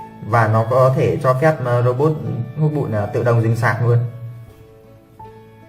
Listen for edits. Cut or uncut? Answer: cut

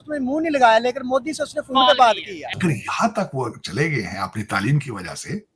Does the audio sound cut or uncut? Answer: cut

